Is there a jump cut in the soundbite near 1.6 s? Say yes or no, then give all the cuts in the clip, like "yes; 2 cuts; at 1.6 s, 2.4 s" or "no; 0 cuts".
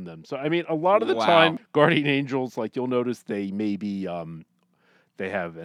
yes; 1 cut; at 1.6 s